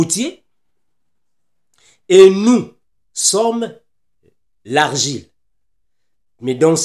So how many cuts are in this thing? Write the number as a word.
zero